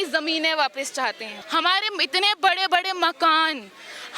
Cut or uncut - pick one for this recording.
cut